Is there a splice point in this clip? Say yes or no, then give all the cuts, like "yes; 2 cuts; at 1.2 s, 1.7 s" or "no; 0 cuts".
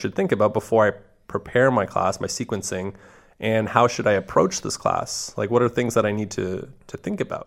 no; 0 cuts